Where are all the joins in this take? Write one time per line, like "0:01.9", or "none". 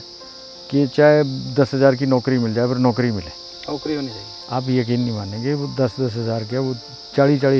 0:04.3